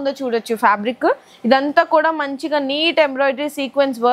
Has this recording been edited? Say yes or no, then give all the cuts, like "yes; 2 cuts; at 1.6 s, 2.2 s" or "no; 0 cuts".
no; 0 cuts